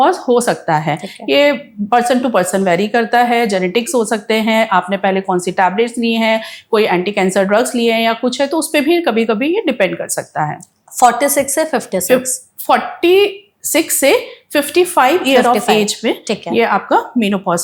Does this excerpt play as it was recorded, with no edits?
yes; 0 cuts

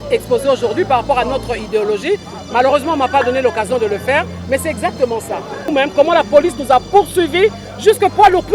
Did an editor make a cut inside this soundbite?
yes; 1 cut; at 5.6 s

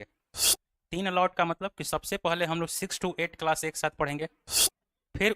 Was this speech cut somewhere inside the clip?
no; 0 cuts

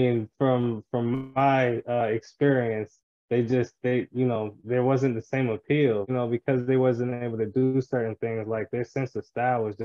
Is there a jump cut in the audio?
yes; 1 cut; at 6.1 s

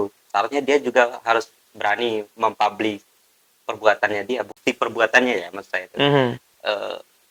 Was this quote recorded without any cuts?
yes; 0 cuts

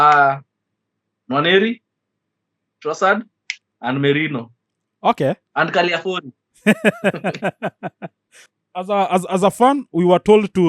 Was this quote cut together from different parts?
yes; 1 cut; at 8.4 s

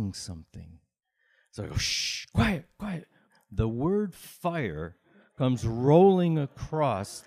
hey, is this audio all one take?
no; 1 cut; at 3.2 s

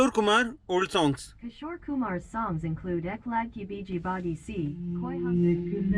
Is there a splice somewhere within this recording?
yes; 2 cuts; at 1.6 s, 4.8 s

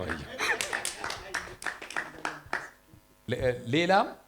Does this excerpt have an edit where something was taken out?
yes; 1 cut; at 3.3 s

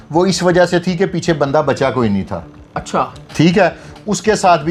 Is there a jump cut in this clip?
no; 0 cuts

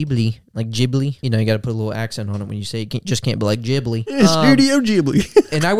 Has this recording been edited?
yes; 2 cuts; at 1.2 s, 4.2 s

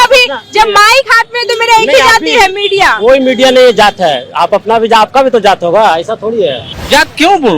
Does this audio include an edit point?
yes; 1 cut; at 6.7 s

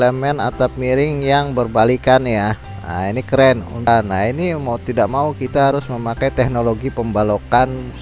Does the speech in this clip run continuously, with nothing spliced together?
no; 1 cut; at 3.9 s

